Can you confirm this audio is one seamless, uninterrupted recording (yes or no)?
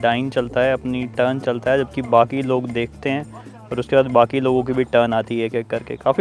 yes